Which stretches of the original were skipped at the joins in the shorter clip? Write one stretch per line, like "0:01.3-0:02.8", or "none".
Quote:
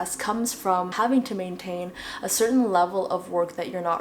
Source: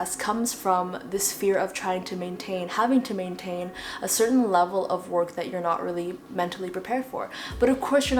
0:00.9-0:02.7